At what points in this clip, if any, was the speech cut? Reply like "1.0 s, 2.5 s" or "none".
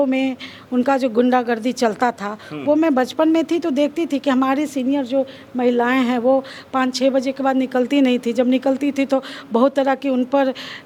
none